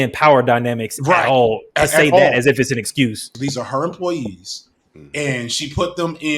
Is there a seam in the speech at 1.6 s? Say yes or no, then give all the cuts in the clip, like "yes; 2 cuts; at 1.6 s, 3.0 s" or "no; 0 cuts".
no; 1 cut; at 3.3 s